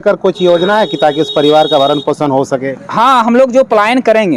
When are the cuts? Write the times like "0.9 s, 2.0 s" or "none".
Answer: none

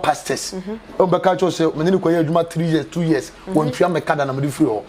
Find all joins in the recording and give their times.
none

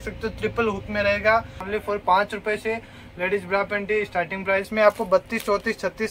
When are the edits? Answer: 1.6 s, 4.7 s

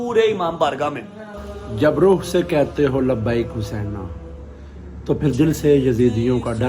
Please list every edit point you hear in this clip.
1.3 s

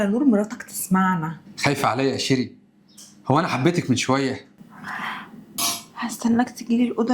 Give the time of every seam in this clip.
4.6 s, 5.5 s

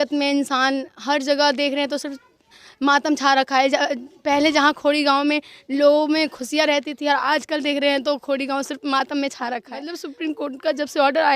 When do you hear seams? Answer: 10.0 s

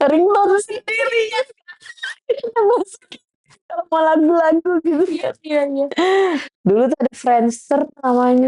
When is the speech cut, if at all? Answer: 6.5 s

